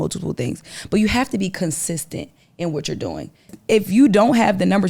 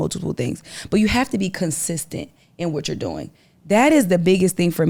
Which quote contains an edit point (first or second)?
first